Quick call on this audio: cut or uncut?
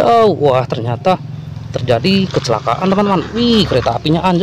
uncut